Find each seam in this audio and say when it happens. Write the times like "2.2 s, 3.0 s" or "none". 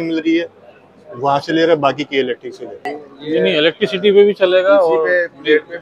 3.0 s